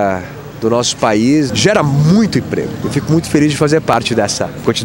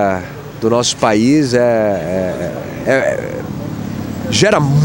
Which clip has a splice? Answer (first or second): first